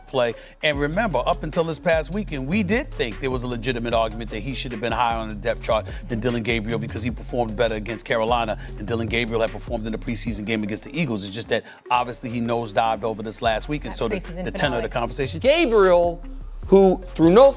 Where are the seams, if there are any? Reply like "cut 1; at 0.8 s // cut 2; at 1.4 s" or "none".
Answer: cut 1; at 15.3 s